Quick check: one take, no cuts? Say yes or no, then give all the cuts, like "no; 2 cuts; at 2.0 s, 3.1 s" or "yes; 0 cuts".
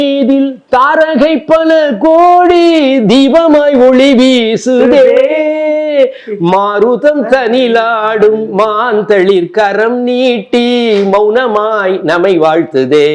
yes; 0 cuts